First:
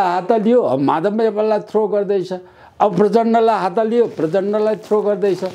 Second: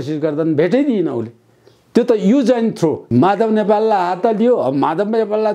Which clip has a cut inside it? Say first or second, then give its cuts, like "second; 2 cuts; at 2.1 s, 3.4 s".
second; 1 cut; at 3.0 s